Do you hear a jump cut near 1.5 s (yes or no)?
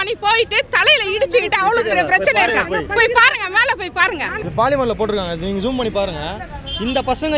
no